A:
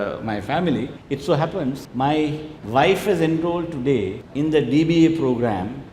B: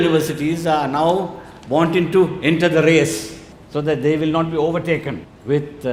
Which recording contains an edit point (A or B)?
A